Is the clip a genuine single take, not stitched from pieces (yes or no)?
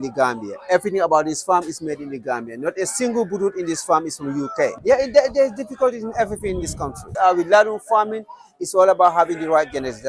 no